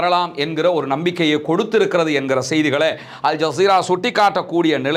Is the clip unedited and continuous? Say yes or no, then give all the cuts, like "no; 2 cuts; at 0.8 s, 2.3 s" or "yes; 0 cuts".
yes; 0 cuts